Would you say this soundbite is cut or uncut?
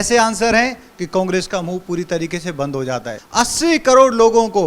cut